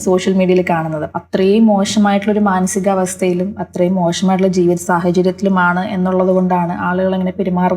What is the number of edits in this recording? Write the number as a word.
one